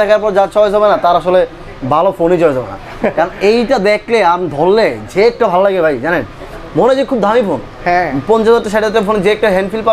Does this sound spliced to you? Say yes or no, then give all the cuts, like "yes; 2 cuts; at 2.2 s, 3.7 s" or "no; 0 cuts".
no; 0 cuts